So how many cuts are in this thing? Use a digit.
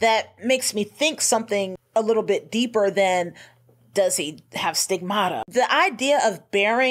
2